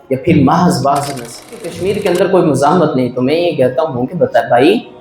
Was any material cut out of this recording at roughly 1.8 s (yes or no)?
yes